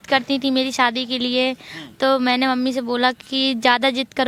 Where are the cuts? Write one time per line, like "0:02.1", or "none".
none